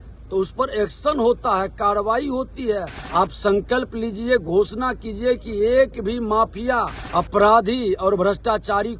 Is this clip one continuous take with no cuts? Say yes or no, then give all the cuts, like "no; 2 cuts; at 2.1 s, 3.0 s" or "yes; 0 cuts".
no; 2 cuts; at 3.0 s, 7.0 s